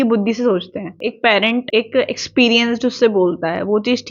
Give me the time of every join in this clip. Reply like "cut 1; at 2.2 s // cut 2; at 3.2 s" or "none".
cut 1; at 0.9 s // cut 2; at 1.7 s